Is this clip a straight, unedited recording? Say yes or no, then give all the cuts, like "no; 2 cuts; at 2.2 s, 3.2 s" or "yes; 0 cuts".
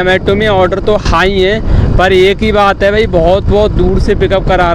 yes; 0 cuts